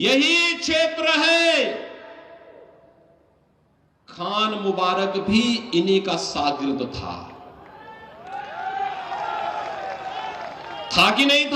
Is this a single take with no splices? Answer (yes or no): yes